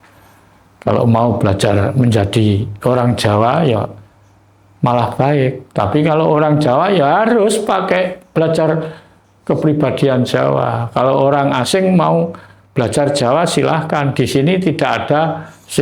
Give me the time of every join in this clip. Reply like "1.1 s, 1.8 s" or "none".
none